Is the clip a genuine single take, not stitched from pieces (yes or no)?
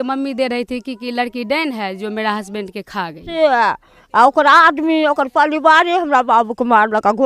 no